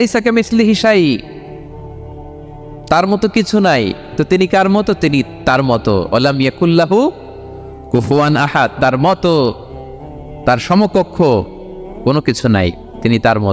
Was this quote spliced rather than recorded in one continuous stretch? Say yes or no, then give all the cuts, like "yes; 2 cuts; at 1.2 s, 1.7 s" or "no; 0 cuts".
no; 0 cuts